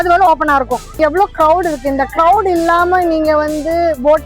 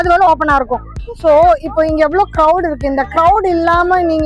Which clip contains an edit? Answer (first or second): first